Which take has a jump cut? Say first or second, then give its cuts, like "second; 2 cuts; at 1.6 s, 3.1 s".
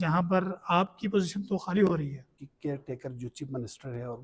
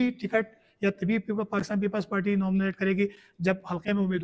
first; 1 cut; at 2.4 s